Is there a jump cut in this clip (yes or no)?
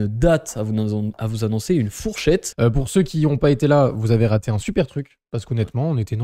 yes